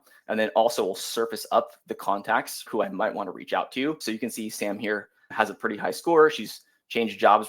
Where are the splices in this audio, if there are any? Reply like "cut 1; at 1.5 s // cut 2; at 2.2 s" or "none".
cut 1; at 2.7 s // cut 2; at 4.0 s // cut 3; at 5.3 s